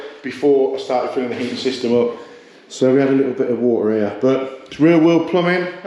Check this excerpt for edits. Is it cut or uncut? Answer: uncut